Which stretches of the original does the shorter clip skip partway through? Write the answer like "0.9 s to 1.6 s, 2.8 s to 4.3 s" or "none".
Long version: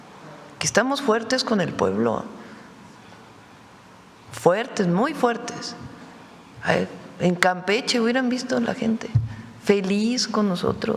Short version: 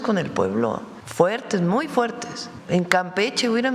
2.4 s to 4.2 s, 5.8 s to 7.0 s